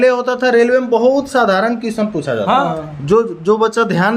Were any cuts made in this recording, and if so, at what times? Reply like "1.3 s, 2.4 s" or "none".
2.6 s